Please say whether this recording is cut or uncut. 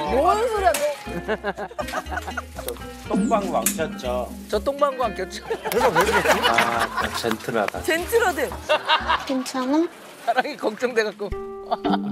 cut